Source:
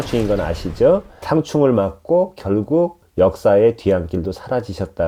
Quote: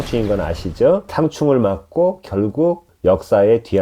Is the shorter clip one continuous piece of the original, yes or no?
no